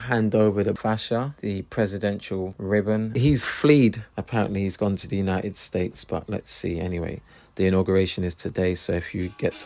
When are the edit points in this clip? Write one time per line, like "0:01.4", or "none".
none